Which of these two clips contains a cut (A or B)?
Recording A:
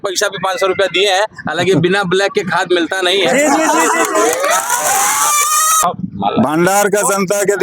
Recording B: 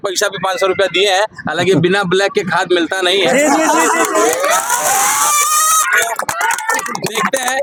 A